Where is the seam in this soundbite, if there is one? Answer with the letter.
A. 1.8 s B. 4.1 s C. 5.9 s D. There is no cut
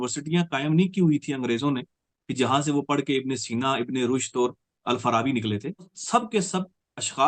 C